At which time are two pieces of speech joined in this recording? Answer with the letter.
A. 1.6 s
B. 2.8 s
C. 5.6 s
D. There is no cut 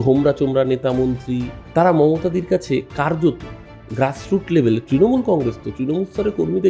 A